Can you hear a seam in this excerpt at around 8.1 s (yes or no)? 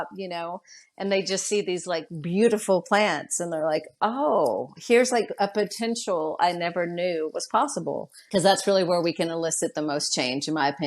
yes